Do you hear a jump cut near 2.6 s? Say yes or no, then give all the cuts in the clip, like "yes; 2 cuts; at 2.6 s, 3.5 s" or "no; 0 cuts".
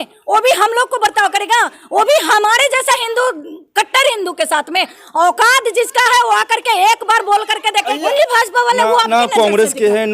no; 1 cut; at 8.1 s